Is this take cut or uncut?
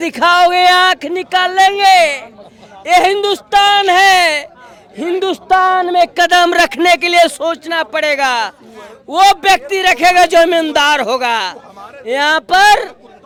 uncut